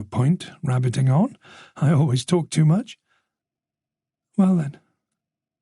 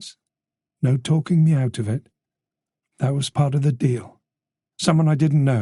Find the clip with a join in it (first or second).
first